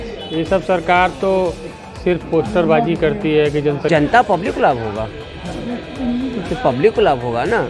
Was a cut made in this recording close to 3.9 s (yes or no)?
yes